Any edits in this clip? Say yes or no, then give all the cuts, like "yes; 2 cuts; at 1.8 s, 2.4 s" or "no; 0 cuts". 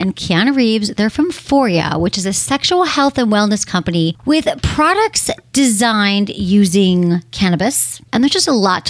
yes; 3 cuts; at 4.2 s, 5.4 s, 8.0 s